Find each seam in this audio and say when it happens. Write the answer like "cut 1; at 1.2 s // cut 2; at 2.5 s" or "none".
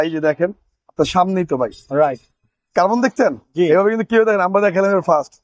none